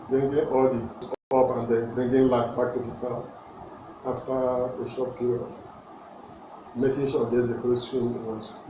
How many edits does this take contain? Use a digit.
1